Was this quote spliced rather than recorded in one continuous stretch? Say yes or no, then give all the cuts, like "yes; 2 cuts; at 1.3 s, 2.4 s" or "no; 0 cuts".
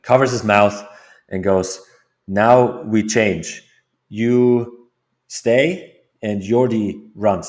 no; 0 cuts